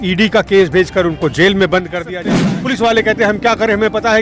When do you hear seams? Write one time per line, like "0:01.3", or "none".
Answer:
0:02.2